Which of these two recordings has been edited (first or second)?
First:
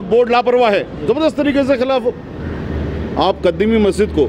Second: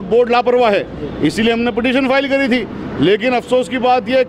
first